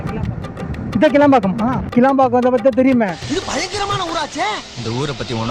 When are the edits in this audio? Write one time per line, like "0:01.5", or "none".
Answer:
none